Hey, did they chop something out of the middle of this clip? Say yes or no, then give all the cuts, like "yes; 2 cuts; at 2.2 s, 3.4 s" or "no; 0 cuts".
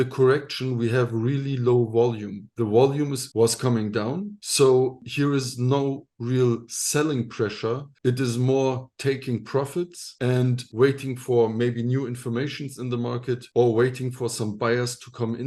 no; 0 cuts